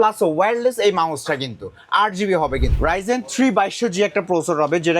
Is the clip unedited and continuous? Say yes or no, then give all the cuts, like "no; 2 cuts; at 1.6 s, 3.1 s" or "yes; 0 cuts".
no; 1 cut; at 2.7 s